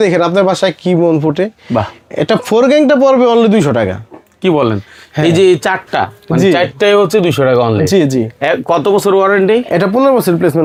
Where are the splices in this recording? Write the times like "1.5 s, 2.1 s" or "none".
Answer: none